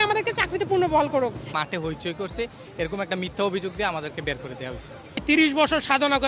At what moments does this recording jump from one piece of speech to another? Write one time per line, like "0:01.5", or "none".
0:01.5
0:05.2